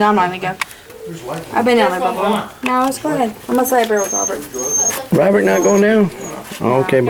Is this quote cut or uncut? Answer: uncut